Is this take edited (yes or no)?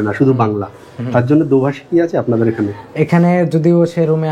no